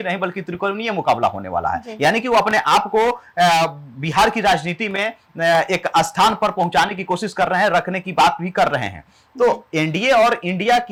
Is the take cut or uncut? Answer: uncut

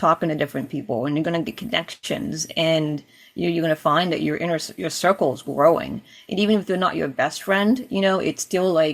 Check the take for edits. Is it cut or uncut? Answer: uncut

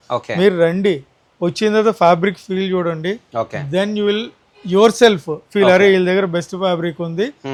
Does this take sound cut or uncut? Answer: uncut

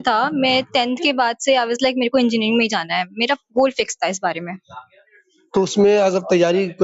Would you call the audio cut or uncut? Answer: uncut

